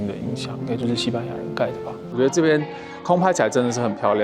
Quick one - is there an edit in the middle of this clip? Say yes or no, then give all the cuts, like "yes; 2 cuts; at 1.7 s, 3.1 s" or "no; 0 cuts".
yes; 1 cut; at 2.1 s